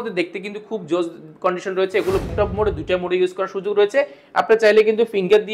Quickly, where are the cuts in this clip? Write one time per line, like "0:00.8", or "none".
0:02.3